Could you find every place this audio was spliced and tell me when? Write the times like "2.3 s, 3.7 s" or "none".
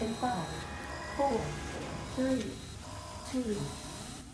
none